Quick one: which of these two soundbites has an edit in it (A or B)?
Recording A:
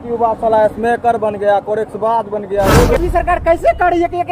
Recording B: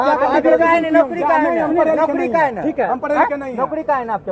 A